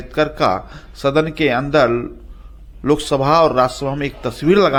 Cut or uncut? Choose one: uncut